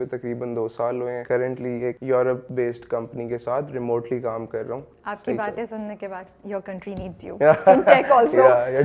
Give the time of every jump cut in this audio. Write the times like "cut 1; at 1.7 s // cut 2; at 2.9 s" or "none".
cut 1; at 1.6 s // cut 2; at 2.5 s // cut 3; at 5.0 s